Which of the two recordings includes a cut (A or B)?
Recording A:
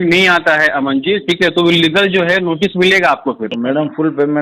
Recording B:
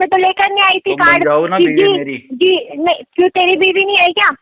A